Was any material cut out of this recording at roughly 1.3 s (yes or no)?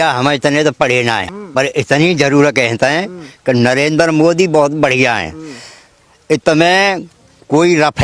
yes